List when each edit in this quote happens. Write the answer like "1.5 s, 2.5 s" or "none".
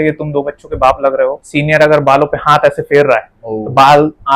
1.4 s